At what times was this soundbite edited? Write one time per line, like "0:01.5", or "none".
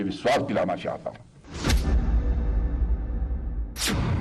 0:01.2